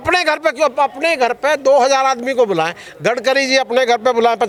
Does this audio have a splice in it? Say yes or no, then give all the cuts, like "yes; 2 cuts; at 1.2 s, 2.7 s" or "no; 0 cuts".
no; 0 cuts